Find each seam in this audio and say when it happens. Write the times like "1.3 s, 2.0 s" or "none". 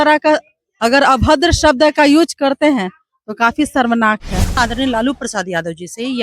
4.6 s